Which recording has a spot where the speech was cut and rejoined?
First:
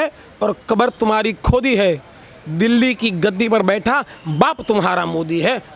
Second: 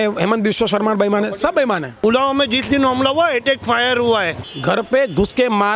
second; 2 cuts; at 1.9 s, 4.4 s

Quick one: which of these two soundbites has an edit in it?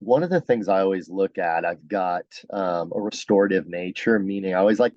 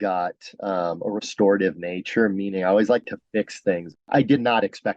second; 1 cut; at 4.1 s

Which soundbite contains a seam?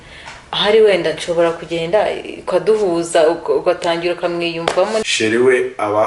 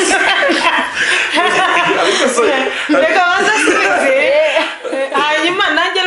first; 1 cut; at 5.1 s

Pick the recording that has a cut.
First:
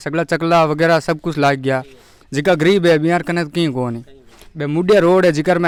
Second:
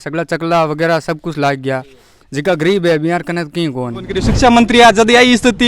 second; 1 cut; at 4.2 s

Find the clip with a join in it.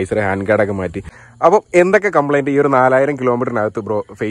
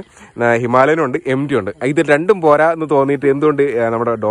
first; 1 cut; at 1.1 s

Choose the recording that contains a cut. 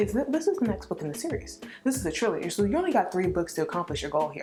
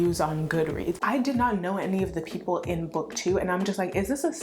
second; 1 cut; at 1.0 s

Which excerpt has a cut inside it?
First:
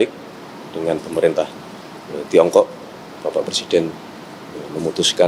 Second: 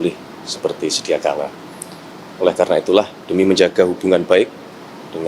second; 1 cut; at 3.2 s

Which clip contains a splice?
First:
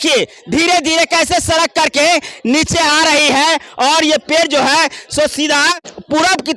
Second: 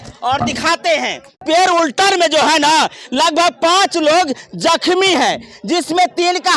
second; 1 cut; at 1.4 s

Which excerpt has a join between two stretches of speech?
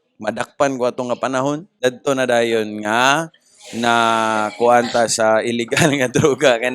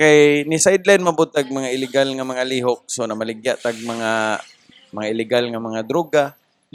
first; 1 cut; at 1.7 s

